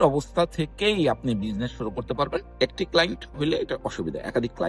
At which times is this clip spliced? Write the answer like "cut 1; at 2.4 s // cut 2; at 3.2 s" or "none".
cut 1; at 2.5 s